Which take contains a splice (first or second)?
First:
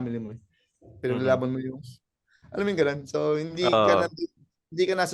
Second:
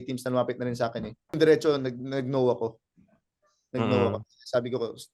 second